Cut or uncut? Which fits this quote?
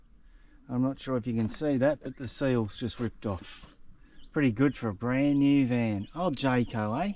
uncut